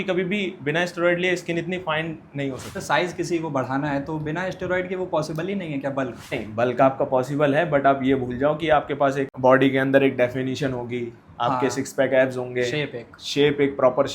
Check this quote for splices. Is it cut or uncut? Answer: cut